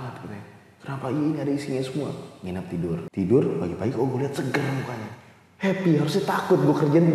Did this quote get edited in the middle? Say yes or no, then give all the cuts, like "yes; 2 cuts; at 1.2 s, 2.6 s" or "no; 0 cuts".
yes; 1 cut; at 3.0 s